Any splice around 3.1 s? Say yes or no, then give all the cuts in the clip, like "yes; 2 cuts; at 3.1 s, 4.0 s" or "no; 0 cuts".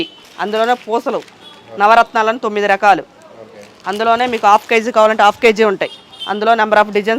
no; 0 cuts